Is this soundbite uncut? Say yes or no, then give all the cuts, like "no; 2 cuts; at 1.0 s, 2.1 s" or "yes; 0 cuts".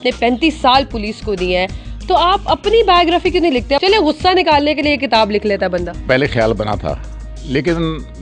yes; 0 cuts